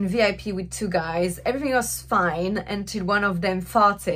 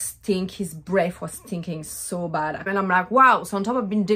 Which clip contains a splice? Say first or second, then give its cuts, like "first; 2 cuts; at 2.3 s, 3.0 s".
second; 1 cut; at 2.7 s